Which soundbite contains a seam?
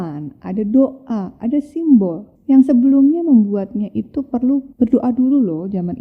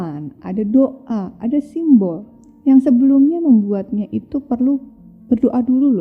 first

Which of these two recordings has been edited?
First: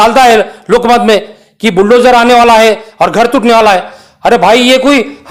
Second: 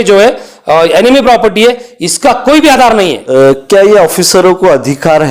second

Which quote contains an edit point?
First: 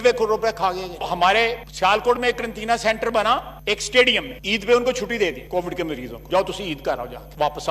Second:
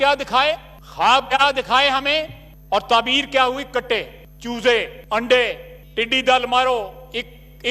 first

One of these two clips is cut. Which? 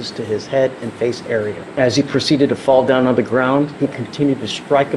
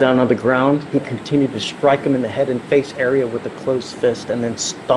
first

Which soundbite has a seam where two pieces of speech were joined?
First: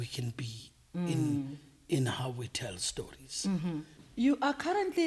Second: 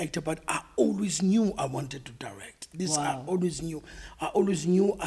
first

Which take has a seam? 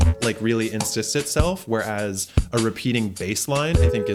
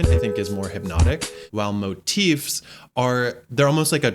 second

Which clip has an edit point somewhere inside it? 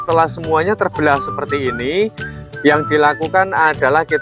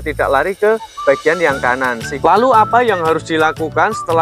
second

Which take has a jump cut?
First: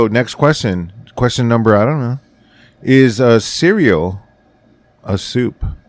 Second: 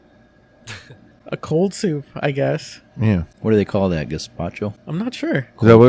second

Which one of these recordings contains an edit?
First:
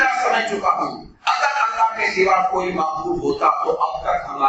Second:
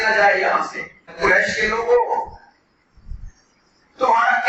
second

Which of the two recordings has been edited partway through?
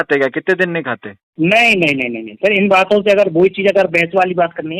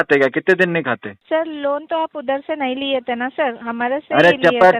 second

